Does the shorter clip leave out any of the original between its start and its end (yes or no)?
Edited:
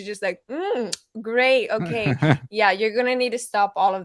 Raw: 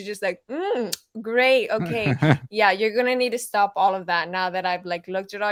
no